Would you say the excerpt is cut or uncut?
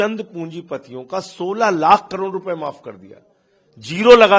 uncut